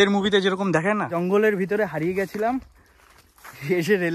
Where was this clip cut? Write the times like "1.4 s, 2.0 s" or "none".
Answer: 1.1 s